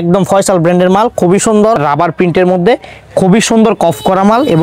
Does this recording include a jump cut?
yes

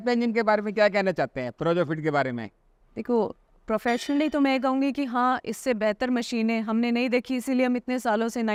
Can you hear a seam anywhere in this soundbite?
no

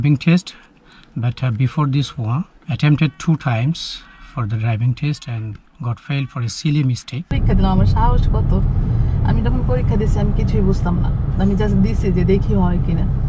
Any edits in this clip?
yes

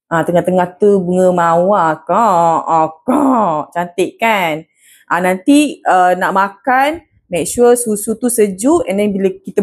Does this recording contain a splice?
no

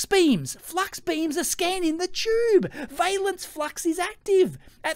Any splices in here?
no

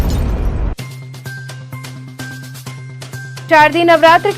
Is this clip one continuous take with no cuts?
yes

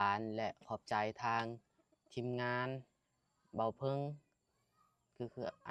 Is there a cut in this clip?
no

